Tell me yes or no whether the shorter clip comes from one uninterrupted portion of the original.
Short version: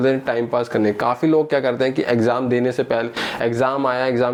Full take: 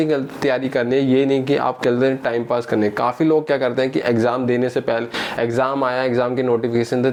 yes